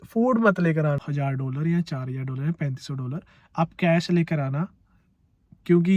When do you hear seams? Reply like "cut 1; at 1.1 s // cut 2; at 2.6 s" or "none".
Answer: cut 1; at 1.1 s